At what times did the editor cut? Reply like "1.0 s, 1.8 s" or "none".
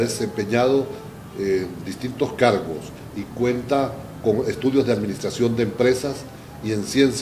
6.0 s